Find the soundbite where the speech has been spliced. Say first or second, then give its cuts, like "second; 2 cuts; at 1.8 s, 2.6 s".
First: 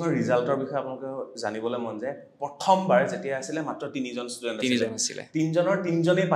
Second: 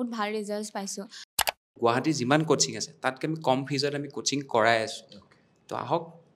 second; 1 cut; at 1.5 s